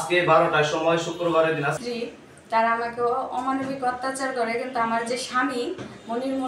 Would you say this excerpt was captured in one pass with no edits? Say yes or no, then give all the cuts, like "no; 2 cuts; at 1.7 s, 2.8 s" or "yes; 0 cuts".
no; 1 cut; at 1.8 s